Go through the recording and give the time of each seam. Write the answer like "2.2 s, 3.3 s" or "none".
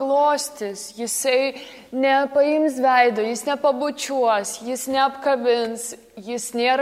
none